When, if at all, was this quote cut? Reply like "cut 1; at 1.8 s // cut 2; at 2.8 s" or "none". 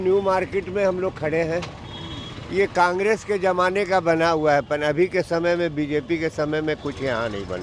none